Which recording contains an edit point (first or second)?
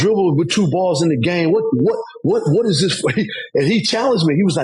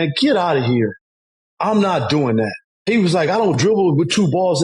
second